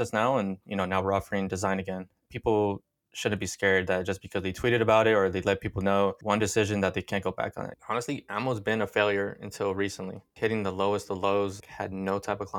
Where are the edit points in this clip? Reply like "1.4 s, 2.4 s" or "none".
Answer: 7.8 s, 10.3 s, 11.6 s